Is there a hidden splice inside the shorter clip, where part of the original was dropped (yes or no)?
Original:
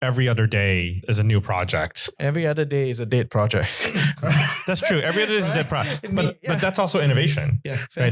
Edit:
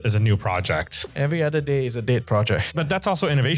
yes